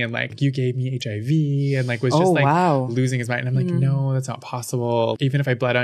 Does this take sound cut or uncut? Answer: cut